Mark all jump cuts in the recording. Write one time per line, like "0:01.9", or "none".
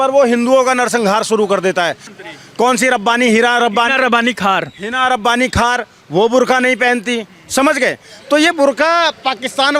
0:02.1